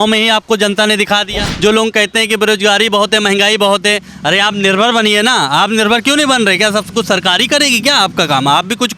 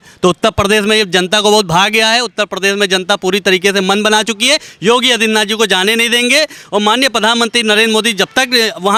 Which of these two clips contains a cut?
first; 1 cut; at 1.4 s

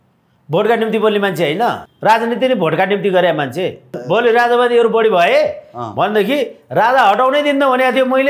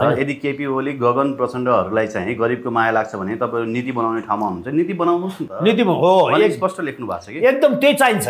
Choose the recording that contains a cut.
first; 2 cuts; at 1.9 s, 4.0 s

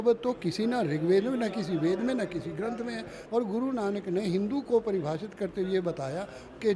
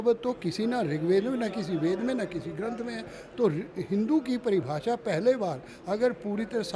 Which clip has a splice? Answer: first; 1 cut; at 3.1 s

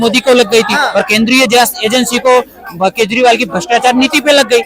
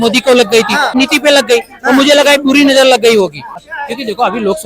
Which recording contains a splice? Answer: second; 2 cuts; at 0.9 s, 3.6 s

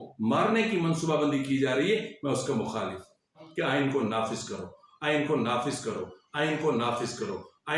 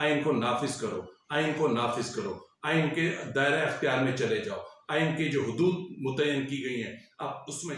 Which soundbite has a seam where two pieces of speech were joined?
first; 1 cut; at 3.5 s

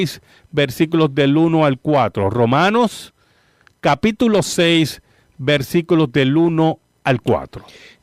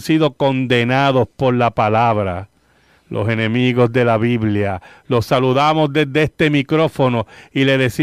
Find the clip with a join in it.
first; 1 cut; at 1.0 s

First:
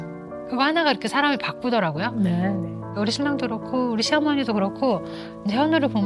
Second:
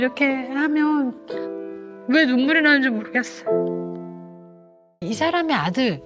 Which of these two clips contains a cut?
second; 1 cut; at 5.0 s

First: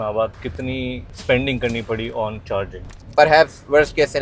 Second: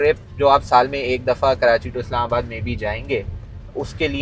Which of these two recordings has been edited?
first; 2 cuts; at 1.1 s, 2.9 s

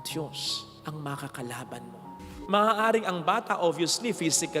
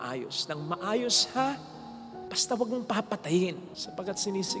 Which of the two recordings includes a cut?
first; 1 cut; at 2.1 s

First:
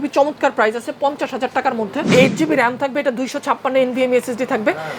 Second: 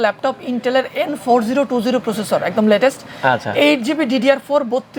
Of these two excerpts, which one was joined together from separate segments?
first; 1 cut; at 2.1 s

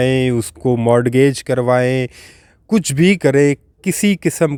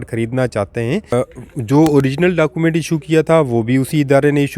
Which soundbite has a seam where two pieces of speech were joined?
second; 1 cut; at 1.1 s

